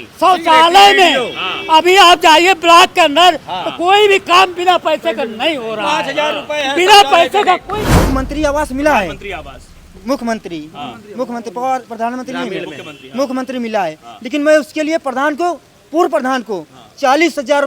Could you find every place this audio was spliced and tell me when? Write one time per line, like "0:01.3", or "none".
0:07.8